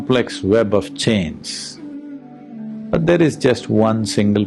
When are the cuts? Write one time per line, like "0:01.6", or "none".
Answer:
0:02.3